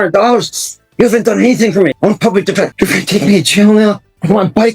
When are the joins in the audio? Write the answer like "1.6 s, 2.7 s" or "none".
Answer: 2.0 s, 2.7 s

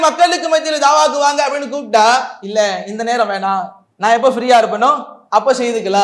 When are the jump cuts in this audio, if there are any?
2.4 s, 3.8 s, 5.1 s

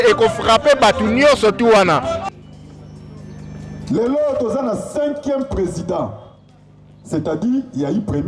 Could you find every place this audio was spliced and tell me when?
2.2 s

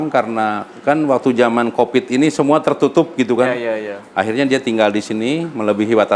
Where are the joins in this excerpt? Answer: none

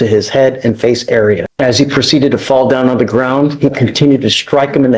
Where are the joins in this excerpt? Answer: 1.5 s

